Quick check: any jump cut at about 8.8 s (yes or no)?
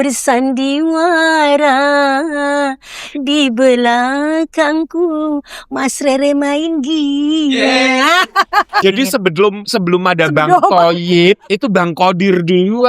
yes